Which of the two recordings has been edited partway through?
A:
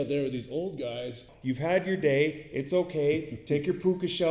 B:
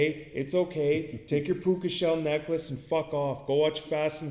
A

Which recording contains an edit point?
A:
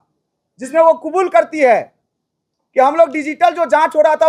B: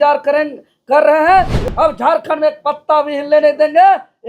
B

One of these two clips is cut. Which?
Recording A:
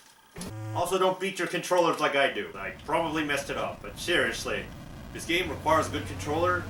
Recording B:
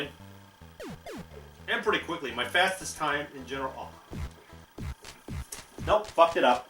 B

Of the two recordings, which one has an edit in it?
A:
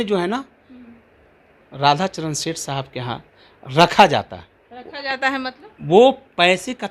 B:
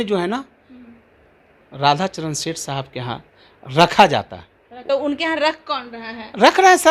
B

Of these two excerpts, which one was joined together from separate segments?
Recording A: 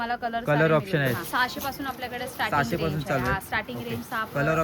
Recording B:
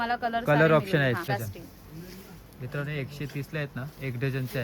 A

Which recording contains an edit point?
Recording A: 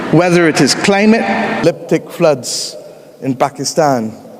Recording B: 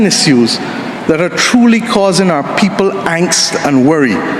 A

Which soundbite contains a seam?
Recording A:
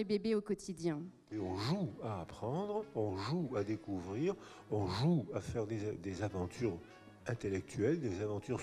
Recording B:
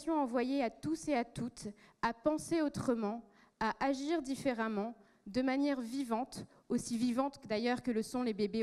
A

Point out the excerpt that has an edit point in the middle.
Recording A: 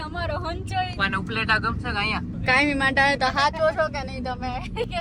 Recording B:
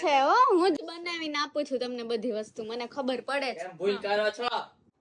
A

